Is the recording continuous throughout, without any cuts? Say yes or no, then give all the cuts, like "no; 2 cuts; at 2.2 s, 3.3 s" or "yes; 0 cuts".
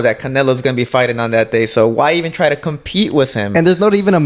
yes; 0 cuts